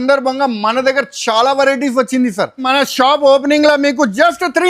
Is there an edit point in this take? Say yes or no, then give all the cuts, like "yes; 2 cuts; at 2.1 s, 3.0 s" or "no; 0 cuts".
yes; 1 cut; at 2.7 s